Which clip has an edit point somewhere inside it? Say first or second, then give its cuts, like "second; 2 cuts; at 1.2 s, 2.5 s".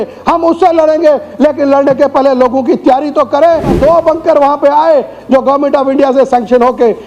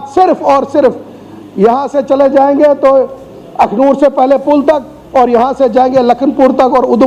first; 1 cut; at 3.7 s